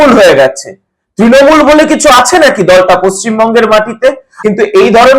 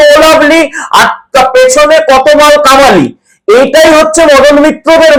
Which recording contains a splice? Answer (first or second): first